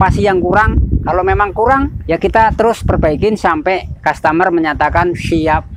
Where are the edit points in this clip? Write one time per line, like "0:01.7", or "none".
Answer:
none